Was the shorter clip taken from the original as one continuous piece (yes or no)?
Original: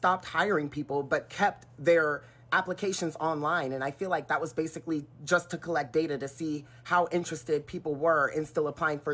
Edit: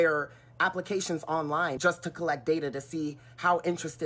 no